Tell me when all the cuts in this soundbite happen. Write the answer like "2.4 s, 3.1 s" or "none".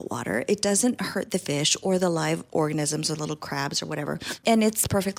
4.3 s